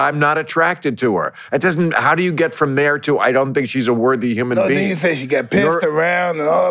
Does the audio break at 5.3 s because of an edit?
no; 0 cuts

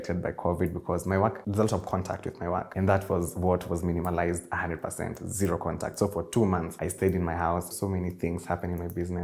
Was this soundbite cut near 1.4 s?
yes; 4 cuts; at 1.4 s, 2.7 s, 6.8 s, 7.7 s

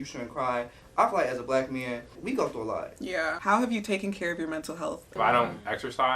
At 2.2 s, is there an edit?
yes; 3 cuts; at 2.2 s, 3.4 s, 5.1 s

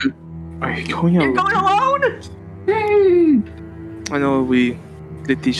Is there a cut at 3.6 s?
yes; 1 cut; at 3.6 s

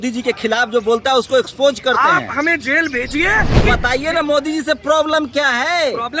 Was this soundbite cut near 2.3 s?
no; 1 cut; at 3.6 s

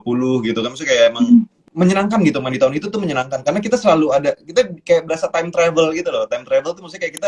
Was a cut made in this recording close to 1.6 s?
yes; 1 cut; at 1.6 s

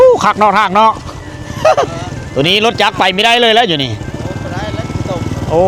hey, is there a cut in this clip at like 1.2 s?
no; 0 cuts

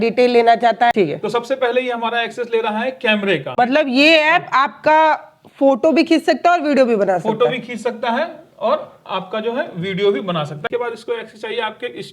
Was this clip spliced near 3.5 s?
yes; 3 cuts; at 0.9 s, 3.5 s, 10.6 s

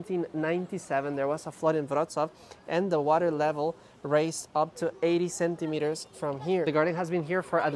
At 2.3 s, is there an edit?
no; 0 cuts

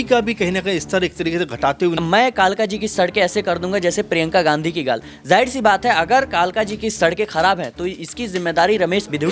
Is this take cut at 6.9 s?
no; 1 cut; at 2.0 s

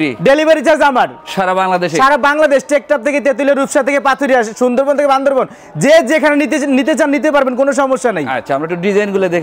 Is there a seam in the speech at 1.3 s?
no; 0 cuts

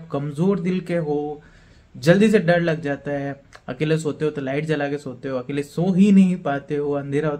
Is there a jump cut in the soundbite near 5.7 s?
no; 0 cuts

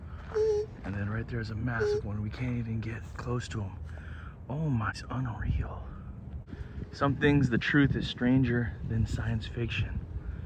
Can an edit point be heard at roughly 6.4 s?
yes; 2 cuts; at 5.0 s, 6.4 s

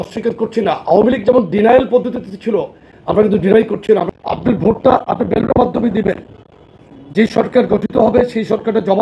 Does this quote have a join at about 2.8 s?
no; 1 cut; at 4.1 s

